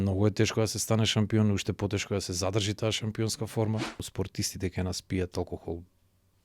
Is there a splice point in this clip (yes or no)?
yes